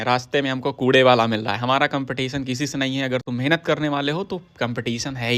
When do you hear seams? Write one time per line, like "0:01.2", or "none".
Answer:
none